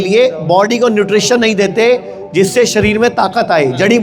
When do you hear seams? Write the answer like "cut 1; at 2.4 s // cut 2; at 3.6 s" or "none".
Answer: none